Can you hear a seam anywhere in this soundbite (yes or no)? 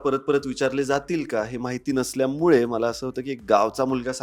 no